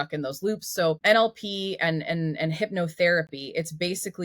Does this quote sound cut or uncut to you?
cut